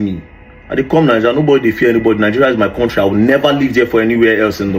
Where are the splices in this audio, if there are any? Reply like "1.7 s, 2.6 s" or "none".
none